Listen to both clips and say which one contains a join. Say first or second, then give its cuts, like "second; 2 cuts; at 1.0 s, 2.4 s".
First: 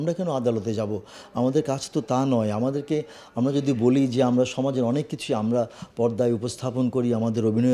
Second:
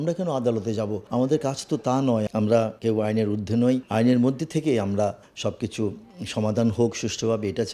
second; 4 cuts; at 1.0 s, 2.6 s, 3.9 s, 5.3 s